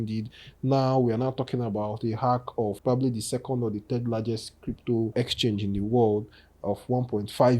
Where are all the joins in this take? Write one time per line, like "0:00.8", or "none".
0:02.8
0:05.1